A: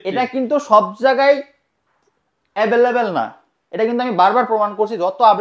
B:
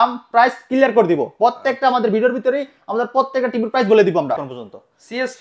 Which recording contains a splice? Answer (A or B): B